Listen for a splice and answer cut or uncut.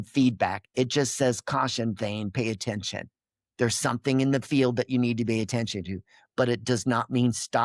uncut